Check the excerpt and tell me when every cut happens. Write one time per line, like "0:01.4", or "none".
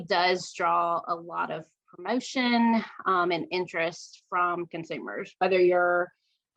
none